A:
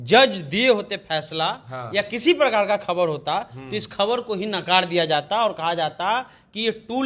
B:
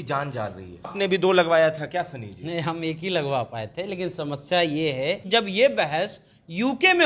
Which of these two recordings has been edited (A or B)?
B